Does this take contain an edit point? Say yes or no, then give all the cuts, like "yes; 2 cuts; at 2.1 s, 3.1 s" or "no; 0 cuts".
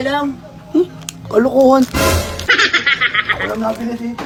no; 0 cuts